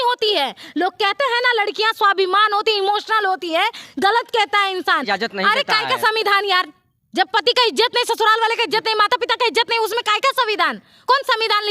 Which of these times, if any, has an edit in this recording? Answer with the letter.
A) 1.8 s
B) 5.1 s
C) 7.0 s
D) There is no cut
B